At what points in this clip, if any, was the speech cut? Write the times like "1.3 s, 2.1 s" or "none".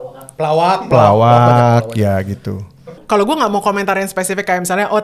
3.0 s